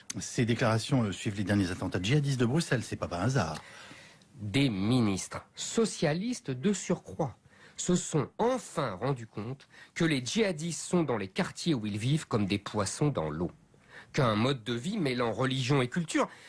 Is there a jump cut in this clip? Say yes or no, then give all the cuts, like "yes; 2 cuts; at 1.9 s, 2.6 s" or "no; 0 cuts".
no; 0 cuts